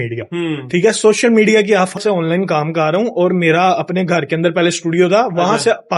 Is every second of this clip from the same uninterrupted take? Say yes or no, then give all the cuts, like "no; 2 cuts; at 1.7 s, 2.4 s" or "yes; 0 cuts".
no; 1 cut; at 2.0 s